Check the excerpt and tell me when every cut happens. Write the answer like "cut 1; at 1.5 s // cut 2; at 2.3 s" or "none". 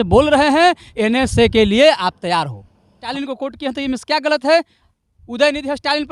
cut 1; at 3.0 s